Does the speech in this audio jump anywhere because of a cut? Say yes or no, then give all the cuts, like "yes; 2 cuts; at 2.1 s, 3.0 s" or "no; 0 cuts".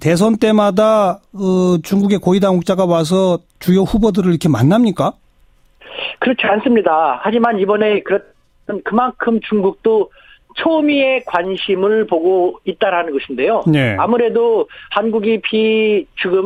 no; 0 cuts